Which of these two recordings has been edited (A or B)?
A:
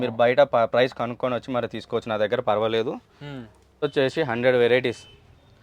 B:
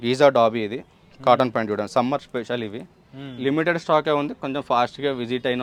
A